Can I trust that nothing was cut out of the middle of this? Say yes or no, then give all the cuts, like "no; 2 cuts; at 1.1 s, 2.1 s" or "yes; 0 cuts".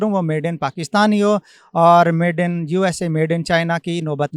yes; 0 cuts